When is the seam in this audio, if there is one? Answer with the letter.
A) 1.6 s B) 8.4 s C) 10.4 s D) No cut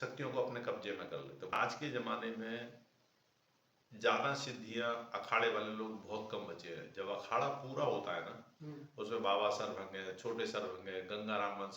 A